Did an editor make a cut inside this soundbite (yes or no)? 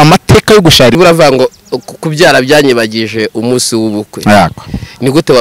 yes